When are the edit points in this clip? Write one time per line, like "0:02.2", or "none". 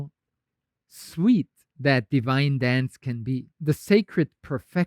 0:03.5